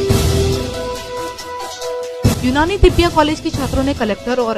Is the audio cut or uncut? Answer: cut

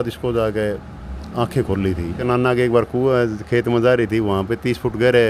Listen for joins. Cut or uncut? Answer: cut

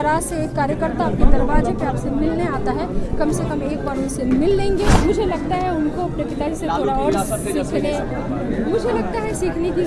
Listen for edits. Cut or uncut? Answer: cut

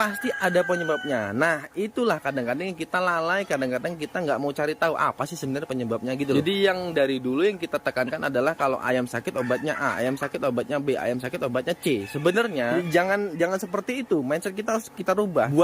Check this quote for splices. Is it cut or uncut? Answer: uncut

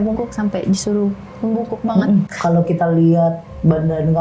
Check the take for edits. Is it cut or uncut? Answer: cut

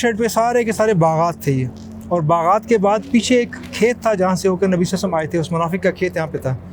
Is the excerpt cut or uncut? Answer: uncut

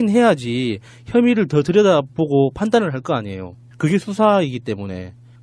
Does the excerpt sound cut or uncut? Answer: uncut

